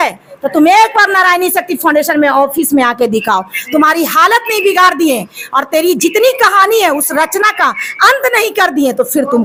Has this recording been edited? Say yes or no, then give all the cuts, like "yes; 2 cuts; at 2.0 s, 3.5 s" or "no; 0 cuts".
no; 0 cuts